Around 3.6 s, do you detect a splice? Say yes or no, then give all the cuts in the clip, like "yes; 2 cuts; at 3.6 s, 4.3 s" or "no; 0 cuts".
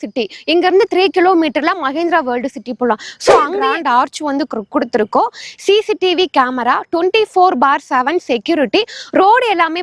yes; 1 cut; at 3.6 s